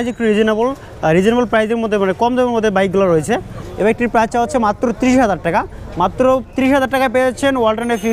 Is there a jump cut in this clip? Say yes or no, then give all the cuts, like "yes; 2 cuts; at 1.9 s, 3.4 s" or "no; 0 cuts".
yes; 1 cut; at 3.6 s